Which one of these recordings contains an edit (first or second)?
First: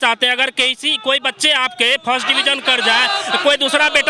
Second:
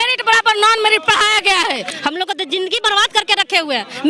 second